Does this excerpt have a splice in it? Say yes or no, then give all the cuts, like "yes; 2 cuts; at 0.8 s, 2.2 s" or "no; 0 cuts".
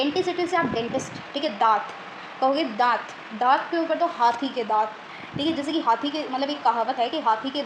no; 0 cuts